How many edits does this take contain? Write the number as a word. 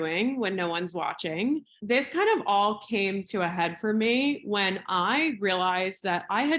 one